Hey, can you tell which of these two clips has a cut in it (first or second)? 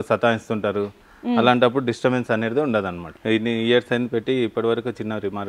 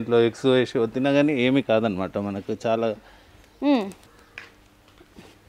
first